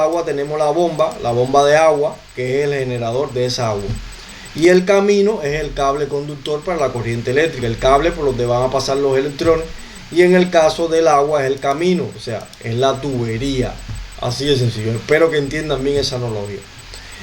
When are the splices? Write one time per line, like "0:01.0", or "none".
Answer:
none